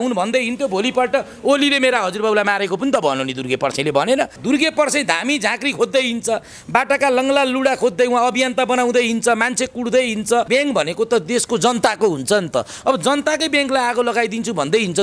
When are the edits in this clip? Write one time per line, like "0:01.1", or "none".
0:04.4
0:10.5